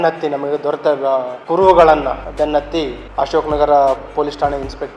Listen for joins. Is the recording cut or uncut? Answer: cut